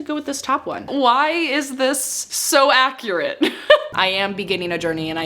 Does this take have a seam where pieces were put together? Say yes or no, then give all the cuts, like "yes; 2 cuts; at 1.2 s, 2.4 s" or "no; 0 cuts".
yes; 2 cuts; at 0.9 s, 3.9 s